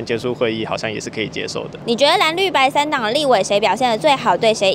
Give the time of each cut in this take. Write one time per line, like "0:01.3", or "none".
none